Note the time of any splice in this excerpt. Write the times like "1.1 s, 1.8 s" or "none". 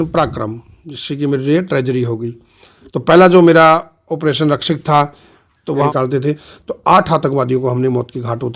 5.9 s